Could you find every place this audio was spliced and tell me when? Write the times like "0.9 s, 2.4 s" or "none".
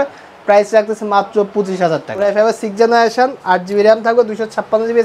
2.2 s